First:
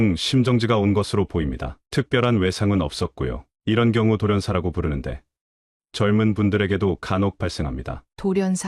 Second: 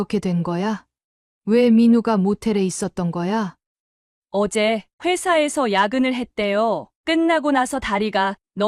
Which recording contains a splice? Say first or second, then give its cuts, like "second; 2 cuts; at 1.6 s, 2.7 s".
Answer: second; 1 cut; at 3.6 s